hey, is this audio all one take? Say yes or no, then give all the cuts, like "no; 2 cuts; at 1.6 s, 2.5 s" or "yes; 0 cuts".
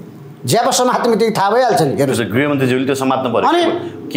yes; 0 cuts